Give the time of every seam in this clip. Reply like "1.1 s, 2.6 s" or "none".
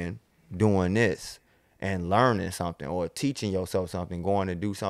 none